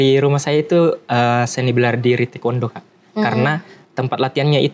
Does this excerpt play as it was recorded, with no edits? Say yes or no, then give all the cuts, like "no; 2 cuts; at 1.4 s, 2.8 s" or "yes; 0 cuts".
yes; 0 cuts